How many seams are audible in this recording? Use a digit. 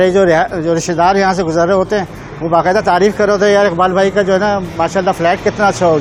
0